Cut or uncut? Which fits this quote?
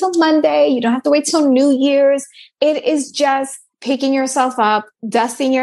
cut